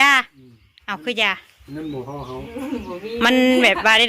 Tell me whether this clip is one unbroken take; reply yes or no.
yes